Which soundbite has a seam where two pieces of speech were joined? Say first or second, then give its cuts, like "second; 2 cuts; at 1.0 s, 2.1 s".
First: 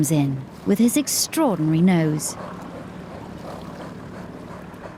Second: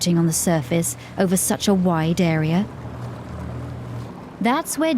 second; 1 cut; at 4.1 s